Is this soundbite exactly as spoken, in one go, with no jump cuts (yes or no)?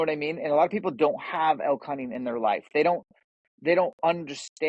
yes